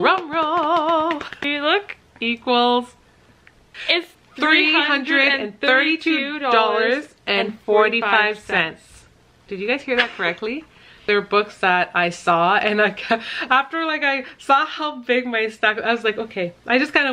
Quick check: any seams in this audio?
yes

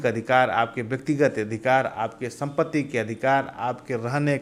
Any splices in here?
no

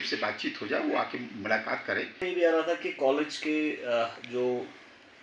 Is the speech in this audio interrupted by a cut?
yes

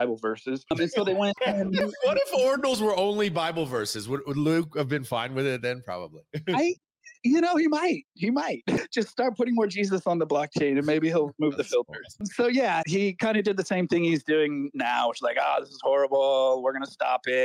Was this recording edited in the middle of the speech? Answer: yes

